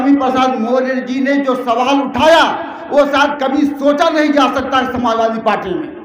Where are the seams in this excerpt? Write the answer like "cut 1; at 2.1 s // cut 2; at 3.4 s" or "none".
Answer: none